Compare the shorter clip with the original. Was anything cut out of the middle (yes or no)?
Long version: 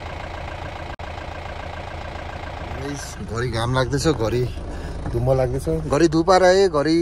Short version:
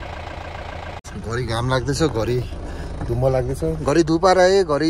yes